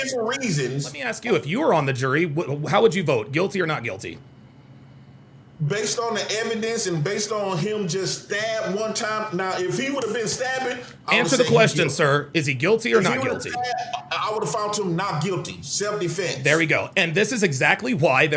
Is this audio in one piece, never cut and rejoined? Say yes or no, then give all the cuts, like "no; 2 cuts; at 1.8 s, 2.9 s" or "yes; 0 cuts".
no; 1 cut; at 1.1 s